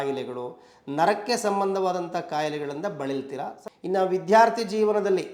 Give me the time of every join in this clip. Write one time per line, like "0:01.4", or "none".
0:03.6